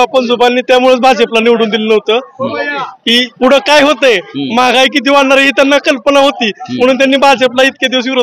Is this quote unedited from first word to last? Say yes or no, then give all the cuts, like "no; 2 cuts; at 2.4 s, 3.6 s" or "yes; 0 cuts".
yes; 0 cuts